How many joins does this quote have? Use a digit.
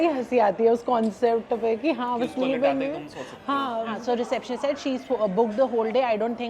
1